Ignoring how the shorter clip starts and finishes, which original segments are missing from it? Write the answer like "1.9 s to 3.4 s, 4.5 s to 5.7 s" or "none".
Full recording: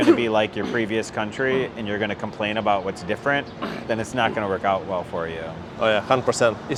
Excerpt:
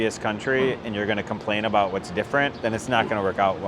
3.5 s to 3.8 s